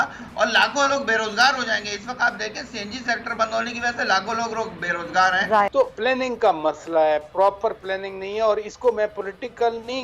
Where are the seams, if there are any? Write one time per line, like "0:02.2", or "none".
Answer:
0:05.7